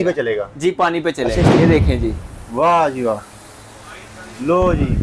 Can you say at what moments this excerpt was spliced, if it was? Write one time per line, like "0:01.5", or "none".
0:01.6